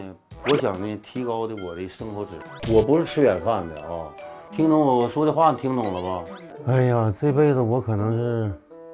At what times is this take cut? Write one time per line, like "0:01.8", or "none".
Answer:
0:02.5
0:06.5